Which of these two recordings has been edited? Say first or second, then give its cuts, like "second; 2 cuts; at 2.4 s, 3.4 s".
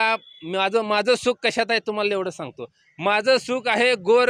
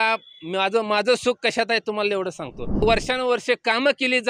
second; 1 cut; at 2.8 s